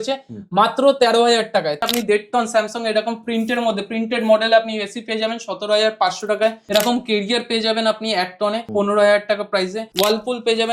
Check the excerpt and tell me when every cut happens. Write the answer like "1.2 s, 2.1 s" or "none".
1.8 s, 6.6 s, 8.6 s, 9.8 s